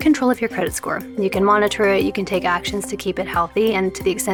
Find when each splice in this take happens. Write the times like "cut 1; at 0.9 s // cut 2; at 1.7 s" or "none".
none

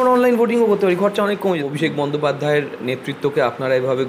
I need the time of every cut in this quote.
cut 1; at 1.6 s

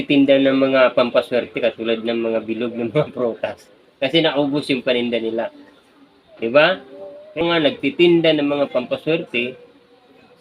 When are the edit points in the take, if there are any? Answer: cut 1; at 7.4 s

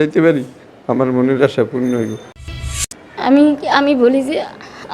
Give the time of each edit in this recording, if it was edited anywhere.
cut 1; at 2.7 s

